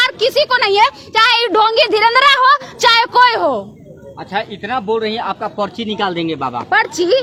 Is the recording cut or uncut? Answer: uncut